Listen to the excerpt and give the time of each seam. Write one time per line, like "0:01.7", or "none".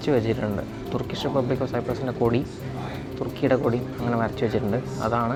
none